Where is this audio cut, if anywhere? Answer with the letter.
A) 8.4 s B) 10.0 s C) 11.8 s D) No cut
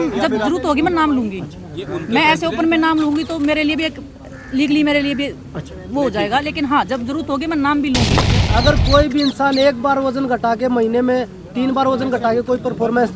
A